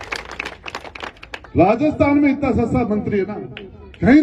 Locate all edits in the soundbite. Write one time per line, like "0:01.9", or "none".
none